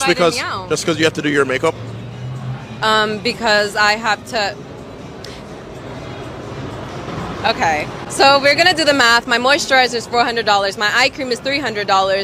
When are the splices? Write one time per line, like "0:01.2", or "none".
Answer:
0:08.0